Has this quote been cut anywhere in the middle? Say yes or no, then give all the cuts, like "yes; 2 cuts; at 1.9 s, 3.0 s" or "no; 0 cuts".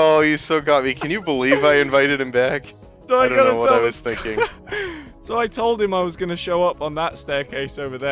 yes; 1 cut; at 4.3 s